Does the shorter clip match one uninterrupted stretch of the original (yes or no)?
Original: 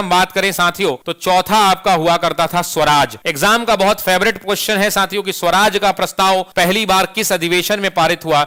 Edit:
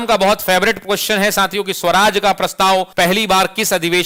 yes